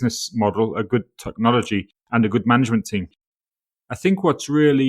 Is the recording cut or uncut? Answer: cut